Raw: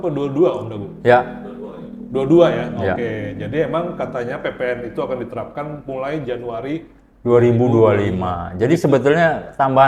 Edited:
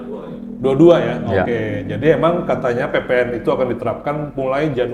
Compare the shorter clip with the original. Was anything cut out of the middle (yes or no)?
no